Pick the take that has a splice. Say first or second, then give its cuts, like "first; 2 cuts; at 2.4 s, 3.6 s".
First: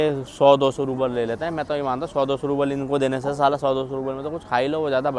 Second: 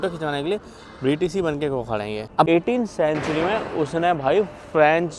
second; 1 cut; at 2.5 s